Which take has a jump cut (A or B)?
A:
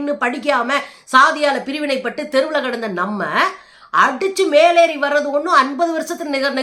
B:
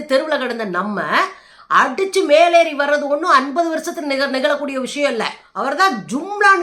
B